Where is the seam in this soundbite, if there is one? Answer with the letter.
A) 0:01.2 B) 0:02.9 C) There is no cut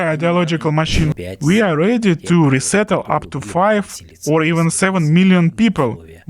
A